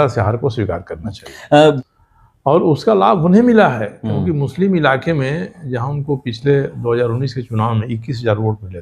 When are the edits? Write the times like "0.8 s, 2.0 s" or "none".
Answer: 1.8 s